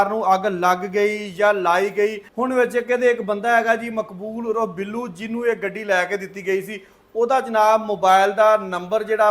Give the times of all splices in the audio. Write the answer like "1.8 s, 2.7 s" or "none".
2.2 s

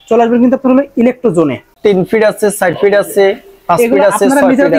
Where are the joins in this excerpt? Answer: 1.7 s

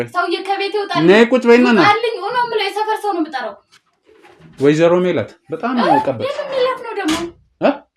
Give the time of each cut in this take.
none

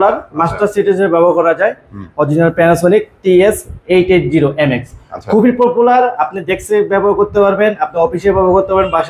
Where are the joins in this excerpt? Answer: none

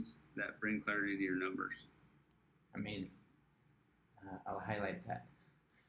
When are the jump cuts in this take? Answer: none

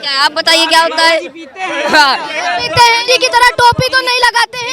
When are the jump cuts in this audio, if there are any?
3.0 s

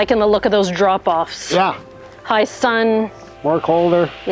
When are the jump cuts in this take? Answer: 3.2 s

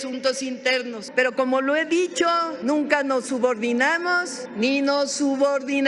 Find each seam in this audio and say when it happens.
1.0 s, 2.5 s, 4.4 s

